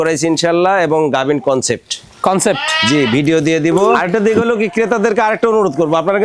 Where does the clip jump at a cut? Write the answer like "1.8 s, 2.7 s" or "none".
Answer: 4.0 s